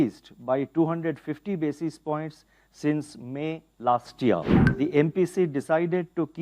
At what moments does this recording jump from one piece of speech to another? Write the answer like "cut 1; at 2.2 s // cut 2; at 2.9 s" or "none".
cut 1; at 4.6 s